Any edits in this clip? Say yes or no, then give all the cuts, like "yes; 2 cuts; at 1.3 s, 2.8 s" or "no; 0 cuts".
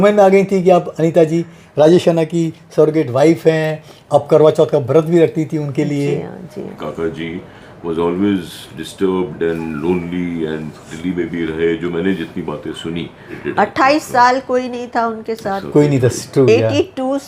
yes; 2 cuts; at 6.7 s, 13.4 s